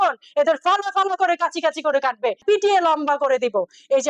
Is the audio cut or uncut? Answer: cut